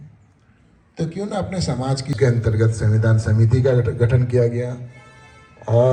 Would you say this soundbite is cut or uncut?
cut